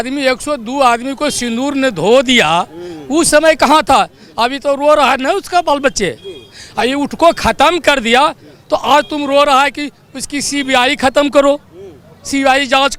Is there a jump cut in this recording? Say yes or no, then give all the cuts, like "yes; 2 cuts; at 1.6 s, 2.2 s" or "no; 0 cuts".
no; 0 cuts